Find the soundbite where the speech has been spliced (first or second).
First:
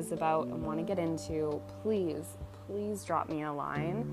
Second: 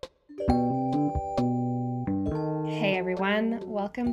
second